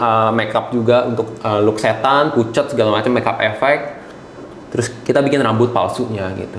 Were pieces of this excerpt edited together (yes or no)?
no